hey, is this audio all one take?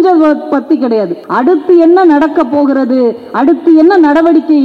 no; 1 cut; at 1.2 s

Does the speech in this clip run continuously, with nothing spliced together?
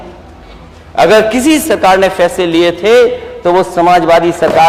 yes; 0 cuts

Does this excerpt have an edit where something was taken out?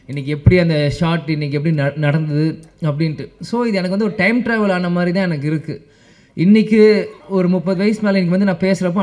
no; 0 cuts

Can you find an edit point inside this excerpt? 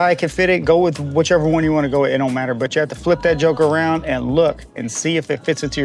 no; 0 cuts

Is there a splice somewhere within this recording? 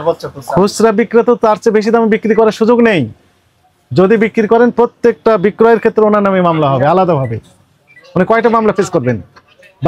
no; 0 cuts

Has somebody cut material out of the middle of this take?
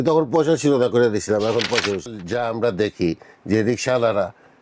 yes; 1 cut; at 2.1 s

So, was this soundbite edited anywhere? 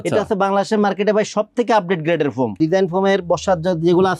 yes; 1 cut; at 2.6 s

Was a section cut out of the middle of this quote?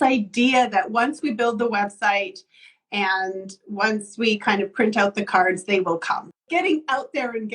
yes; 2 cuts; at 1.2 s, 6.4 s

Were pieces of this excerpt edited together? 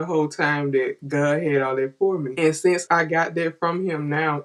no; 0 cuts

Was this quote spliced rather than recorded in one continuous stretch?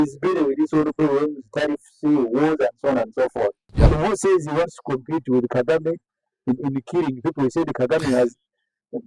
yes; 1 cut; at 3.7 s

